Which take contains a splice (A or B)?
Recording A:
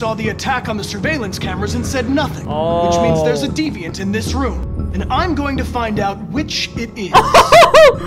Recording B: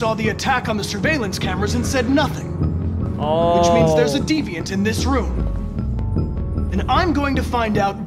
A